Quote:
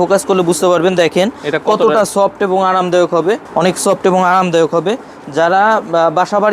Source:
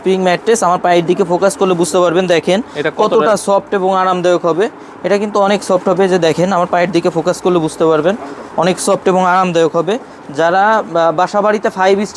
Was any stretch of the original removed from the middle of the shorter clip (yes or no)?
yes